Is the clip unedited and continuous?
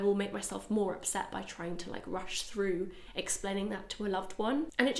yes; 0 cuts

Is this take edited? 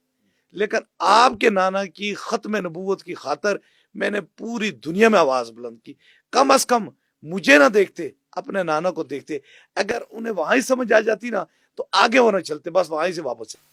no; 0 cuts

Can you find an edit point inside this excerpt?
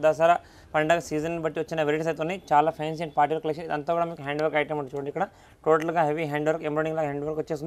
no; 0 cuts

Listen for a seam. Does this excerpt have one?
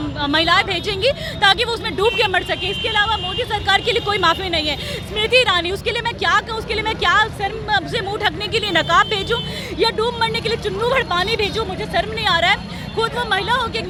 no; 0 cuts

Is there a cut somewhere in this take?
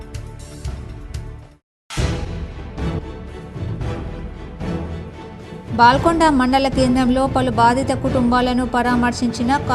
no; 0 cuts

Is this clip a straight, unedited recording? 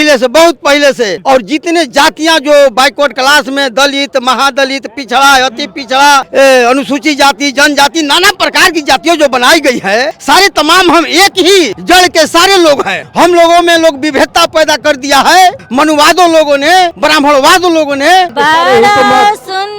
no; 8 cuts; at 1.2 s, 6.3 s, 10.1 s, 11.8 s, 13.0 s, 15.6 s, 17.0 s, 18.3 s

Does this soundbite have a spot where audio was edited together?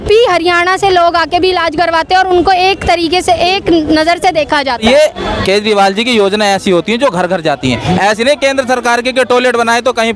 yes; 1 cut; at 4.8 s

